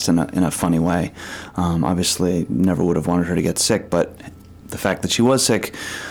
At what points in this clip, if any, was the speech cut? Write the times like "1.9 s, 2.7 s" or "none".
none